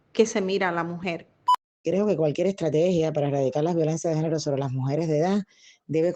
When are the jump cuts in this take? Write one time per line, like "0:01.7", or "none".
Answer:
0:01.7